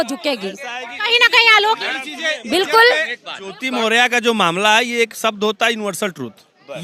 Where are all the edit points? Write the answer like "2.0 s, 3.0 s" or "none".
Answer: none